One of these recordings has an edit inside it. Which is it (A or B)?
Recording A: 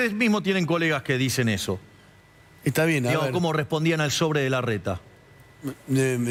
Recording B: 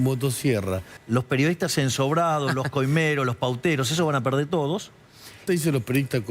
B